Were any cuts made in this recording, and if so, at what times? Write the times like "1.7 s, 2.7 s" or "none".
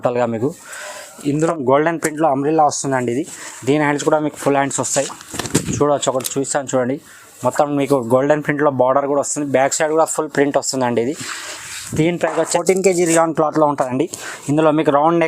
1.5 s, 12.4 s